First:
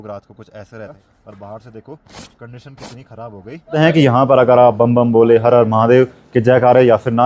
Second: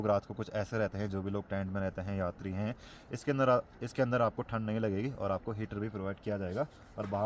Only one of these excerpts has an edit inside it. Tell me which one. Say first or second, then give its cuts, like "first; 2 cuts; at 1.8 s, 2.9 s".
first; 2 cuts; at 0.9 s, 3.7 s